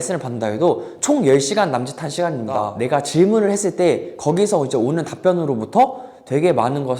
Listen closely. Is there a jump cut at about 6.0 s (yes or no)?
no